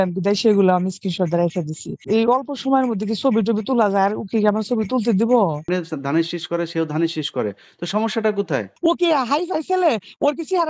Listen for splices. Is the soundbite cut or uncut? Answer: cut